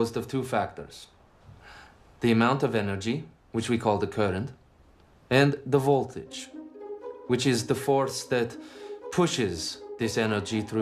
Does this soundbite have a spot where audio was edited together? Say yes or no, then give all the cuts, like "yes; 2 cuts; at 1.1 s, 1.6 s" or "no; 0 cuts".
yes; 1 cut; at 4.0 s